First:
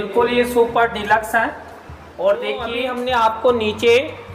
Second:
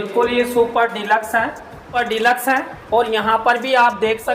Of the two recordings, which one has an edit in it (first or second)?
second